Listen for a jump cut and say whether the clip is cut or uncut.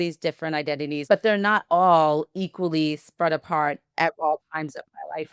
cut